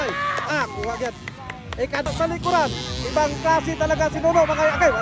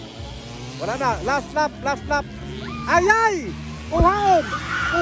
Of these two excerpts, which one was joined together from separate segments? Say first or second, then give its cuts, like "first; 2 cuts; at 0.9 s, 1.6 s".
first; 1 cut; at 2.1 s